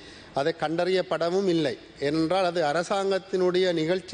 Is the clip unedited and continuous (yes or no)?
yes